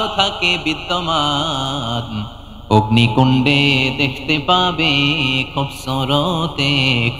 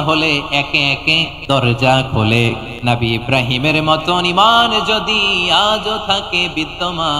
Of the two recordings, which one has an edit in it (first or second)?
second